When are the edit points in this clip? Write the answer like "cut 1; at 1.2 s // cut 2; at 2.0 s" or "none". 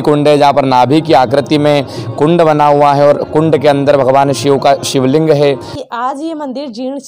cut 1; at 5.7 s